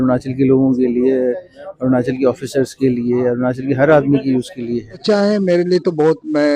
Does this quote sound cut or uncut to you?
cut